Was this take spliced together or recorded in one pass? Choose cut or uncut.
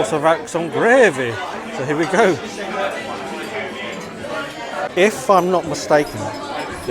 cut